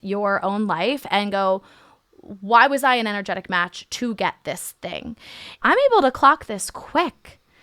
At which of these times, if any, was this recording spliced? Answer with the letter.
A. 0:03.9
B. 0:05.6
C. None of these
B